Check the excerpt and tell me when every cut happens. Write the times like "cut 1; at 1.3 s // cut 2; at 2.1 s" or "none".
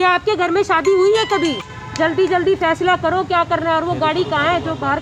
cut 1; at 1.7 s